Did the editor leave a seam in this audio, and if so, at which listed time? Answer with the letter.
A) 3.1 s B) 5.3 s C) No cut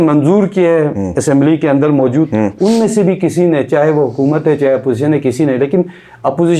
C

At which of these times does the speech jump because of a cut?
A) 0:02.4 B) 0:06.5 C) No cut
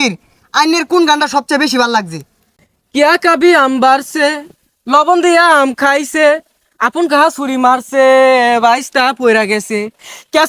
A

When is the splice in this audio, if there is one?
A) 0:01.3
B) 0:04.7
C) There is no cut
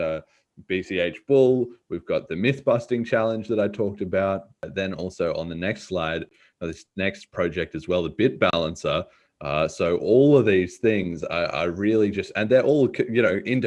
B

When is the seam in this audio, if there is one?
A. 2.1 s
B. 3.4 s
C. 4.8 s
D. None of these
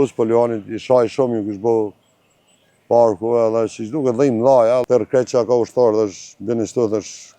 C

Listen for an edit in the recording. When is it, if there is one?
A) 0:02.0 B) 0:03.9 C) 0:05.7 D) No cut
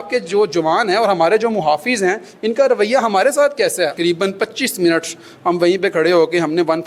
B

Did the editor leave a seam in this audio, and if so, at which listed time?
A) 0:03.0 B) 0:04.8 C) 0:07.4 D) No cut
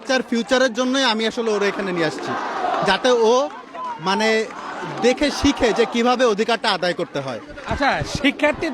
D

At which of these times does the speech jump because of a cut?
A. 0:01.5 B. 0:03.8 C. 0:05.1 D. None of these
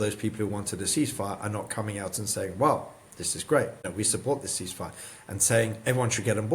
B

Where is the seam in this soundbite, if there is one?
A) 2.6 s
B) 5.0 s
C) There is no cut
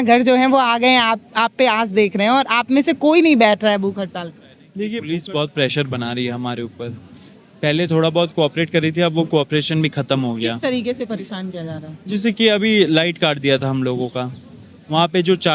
B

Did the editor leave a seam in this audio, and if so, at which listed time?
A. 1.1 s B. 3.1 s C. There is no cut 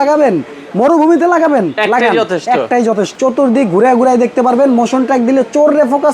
B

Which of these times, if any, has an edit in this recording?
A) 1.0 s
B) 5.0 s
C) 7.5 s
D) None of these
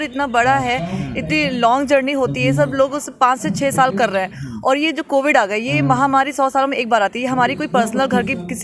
D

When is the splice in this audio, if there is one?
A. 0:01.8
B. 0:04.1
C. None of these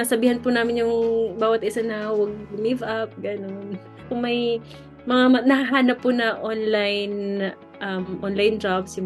B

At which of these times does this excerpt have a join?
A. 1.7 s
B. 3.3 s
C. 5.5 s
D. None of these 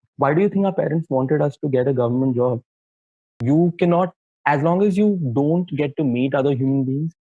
B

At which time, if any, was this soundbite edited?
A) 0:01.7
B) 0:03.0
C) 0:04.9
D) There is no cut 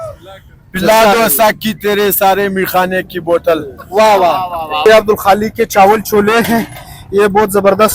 C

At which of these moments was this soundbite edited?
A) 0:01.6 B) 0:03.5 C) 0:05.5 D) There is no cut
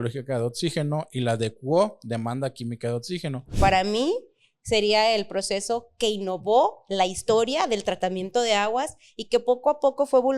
B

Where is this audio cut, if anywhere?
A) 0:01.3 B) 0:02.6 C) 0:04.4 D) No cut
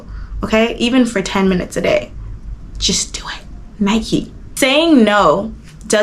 C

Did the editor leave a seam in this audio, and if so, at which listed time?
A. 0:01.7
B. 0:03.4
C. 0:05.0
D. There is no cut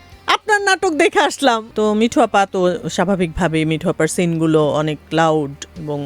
A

